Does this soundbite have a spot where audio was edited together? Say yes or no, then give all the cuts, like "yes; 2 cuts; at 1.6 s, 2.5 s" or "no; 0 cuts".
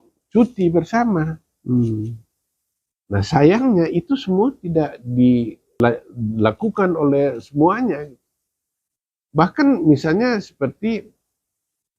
yes; 1 cut; at 5.8 s